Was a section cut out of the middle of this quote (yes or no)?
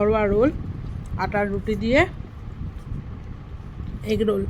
no